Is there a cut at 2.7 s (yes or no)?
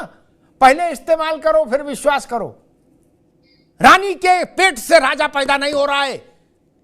yes